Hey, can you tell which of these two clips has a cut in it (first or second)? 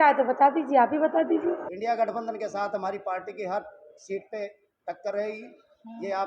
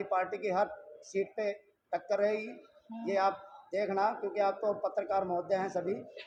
first